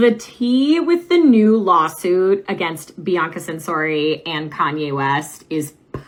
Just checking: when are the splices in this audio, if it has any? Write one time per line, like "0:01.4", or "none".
none